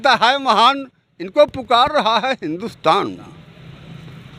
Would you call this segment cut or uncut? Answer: uncut